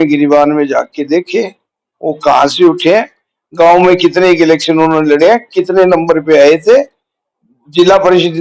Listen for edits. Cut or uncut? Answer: uncut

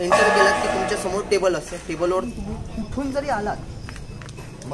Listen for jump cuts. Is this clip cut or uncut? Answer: cut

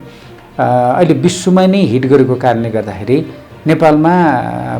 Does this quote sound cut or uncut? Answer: uncut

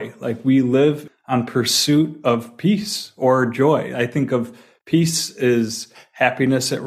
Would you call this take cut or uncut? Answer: cut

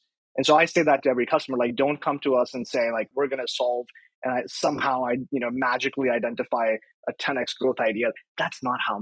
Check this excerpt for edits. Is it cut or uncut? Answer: cut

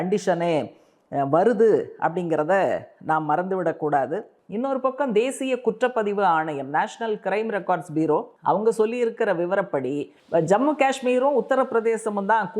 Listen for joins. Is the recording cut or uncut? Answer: cut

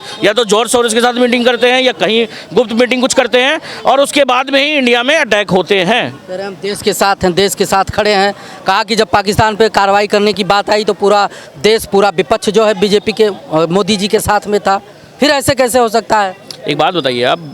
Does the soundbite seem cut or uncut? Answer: uncut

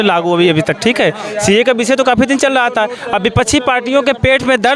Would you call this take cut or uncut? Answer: uncut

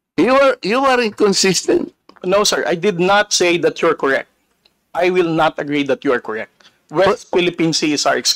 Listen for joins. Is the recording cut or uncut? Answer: uncut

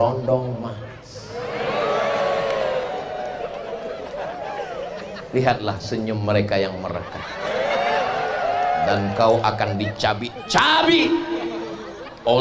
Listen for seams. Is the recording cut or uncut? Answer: uncut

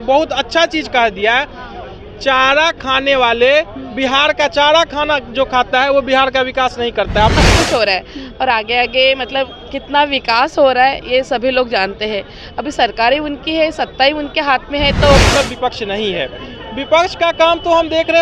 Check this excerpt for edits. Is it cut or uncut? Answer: cut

